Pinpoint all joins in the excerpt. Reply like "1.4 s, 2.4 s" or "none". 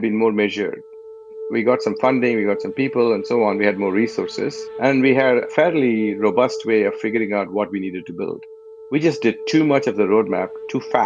1.4 s, 5.5 s, 8.6 s